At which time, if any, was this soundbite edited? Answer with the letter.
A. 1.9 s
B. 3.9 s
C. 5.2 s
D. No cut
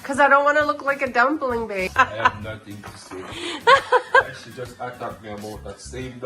A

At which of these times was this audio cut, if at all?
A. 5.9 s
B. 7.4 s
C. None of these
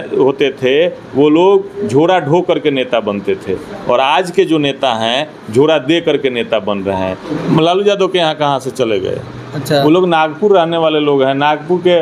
B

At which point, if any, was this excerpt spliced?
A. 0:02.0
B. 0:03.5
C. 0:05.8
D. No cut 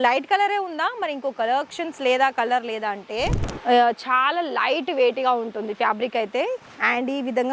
B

